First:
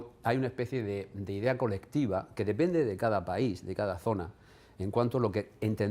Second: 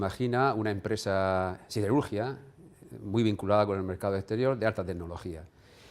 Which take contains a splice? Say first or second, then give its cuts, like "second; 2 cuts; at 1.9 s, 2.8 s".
second; 1 cut; at 2.9 s